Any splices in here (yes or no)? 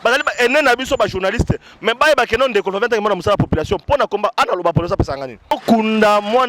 yes